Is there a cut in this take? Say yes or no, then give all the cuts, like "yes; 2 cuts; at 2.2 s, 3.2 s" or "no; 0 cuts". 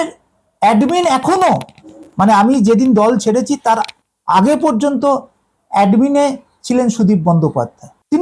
no; 0 cuts